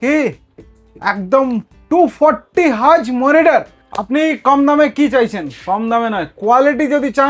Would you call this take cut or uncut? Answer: cut